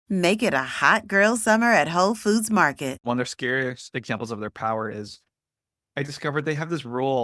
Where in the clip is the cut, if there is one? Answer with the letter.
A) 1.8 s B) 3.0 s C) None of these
B